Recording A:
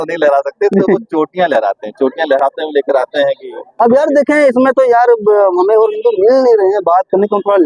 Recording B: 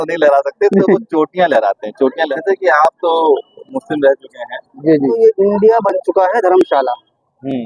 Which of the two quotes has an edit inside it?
B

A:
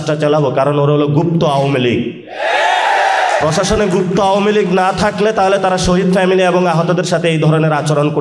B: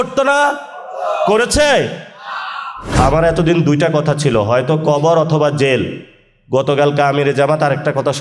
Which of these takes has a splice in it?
B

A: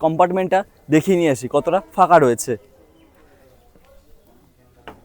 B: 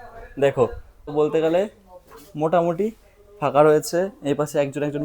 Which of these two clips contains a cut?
B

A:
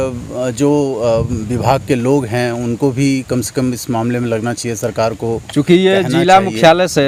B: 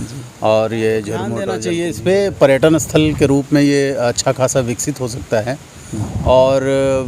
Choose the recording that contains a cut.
B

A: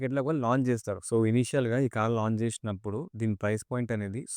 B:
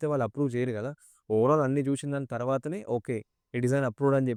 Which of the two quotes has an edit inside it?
A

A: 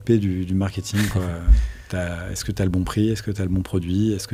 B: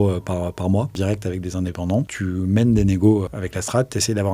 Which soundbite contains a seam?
B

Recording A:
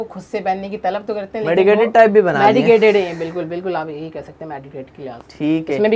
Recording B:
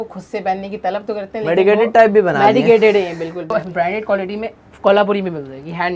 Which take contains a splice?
B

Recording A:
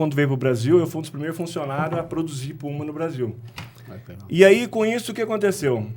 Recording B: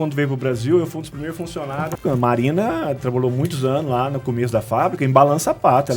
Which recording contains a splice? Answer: B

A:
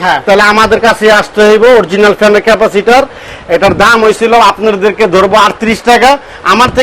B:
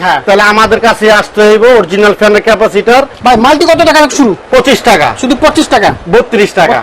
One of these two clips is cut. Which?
B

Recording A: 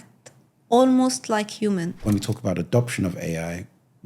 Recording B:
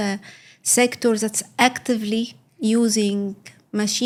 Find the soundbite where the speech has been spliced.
A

